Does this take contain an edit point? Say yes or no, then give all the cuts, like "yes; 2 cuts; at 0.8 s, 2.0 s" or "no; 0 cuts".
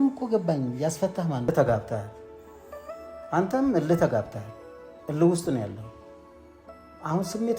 yes; 1 cut; at 1.5 s